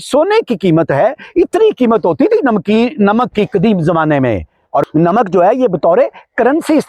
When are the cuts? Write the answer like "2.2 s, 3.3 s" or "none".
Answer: 4.9 s

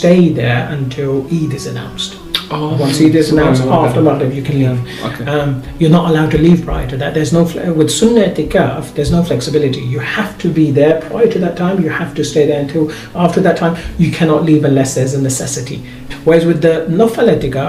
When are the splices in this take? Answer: 16.0 s

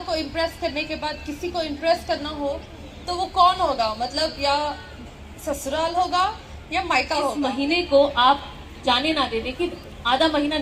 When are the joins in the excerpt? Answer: 7.0 s

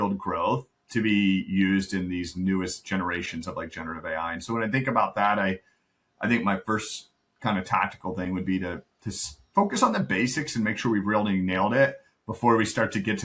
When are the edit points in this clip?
none

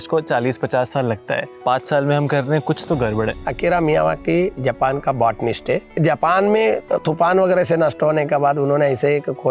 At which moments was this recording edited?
1.5 s, 3.5 s, 5.9 s

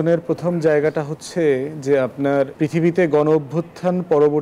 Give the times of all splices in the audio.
2.5 s

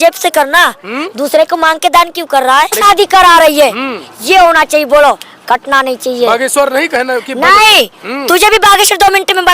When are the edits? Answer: 2.8 s

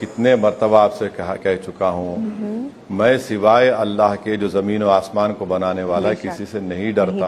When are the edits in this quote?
none

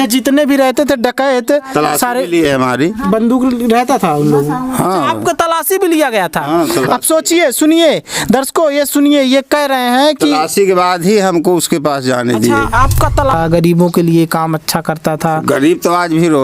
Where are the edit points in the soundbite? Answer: 13.3 s

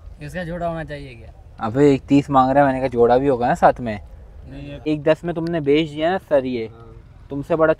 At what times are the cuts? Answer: 4.8 s

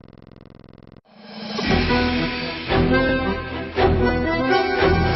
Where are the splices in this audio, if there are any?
1.0 s

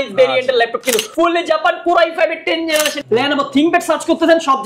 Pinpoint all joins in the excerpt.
1.1 s, 3.0 s

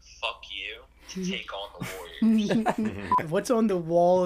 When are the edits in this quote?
3.1 s

